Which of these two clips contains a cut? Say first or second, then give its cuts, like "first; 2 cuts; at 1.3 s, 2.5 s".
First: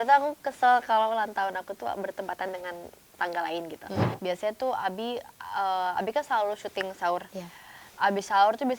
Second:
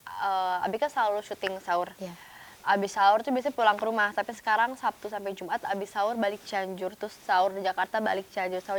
first; 1 cut; at 4.1 s